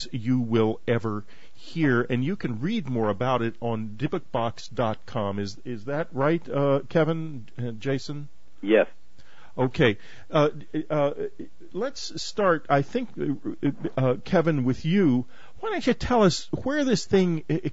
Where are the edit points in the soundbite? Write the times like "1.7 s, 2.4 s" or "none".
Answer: 5.2 s